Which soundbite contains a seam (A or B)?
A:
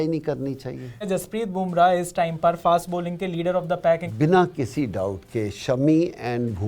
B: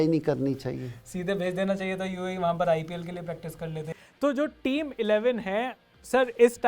A